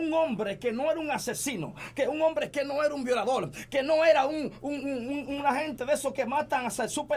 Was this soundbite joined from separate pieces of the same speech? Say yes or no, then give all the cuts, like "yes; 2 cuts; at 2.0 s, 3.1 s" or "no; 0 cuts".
no; 0 cuts